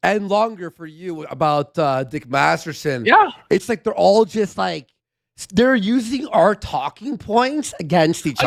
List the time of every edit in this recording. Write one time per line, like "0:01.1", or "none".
none